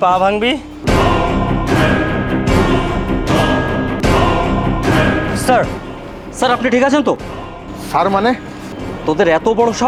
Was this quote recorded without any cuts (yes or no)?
yes